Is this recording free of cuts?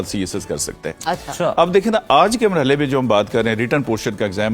yes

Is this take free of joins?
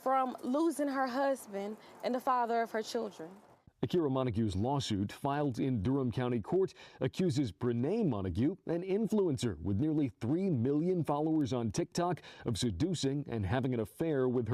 no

